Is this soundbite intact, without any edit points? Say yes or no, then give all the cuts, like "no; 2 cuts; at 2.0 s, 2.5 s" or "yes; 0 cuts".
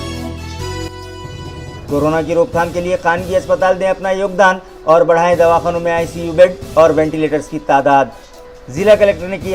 no; 1 cut; at 1.8 s